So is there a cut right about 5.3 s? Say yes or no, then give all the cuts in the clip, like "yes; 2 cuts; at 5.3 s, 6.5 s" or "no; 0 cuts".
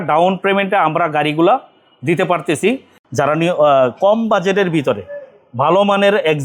no; 1 cut; at 2.9 s